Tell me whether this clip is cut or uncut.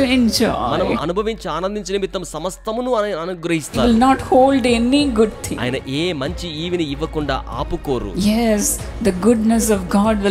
cut